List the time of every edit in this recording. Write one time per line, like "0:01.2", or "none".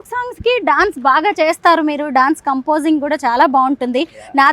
none